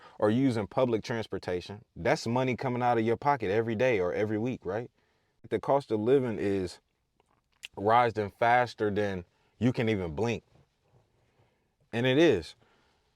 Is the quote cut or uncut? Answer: cut